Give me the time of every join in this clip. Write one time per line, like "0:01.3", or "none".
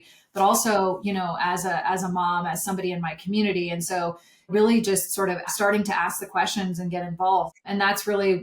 0:04.5
0:05.5
0:07.5